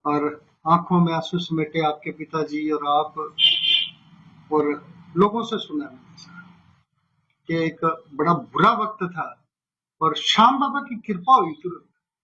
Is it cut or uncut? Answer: uncut